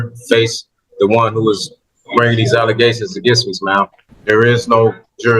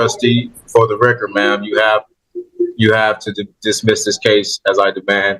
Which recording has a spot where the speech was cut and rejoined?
first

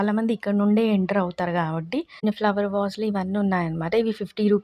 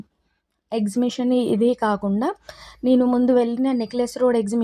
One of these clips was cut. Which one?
first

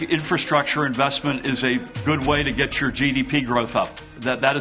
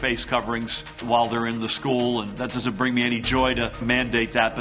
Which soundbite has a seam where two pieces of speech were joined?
second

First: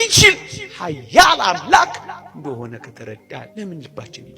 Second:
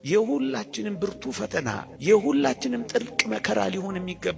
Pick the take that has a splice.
first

